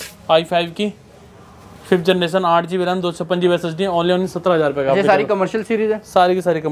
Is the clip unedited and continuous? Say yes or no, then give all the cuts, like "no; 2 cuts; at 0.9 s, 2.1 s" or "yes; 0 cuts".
yes; 0 cuts